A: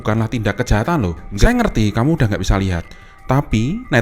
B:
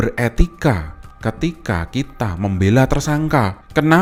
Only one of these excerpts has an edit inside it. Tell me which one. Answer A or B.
A